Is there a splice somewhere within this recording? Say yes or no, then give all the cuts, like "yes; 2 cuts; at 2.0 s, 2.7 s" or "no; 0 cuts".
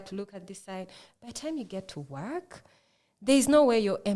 no; 0 cuts